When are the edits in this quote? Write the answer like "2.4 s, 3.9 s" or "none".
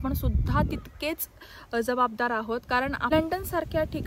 3.1 s